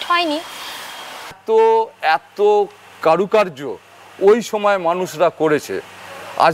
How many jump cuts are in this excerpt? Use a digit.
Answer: 1